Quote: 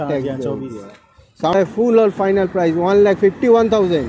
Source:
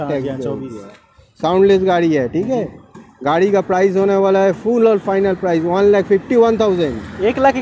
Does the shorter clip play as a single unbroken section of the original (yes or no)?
no